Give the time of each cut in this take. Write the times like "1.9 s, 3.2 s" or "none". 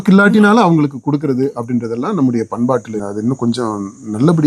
3.0 s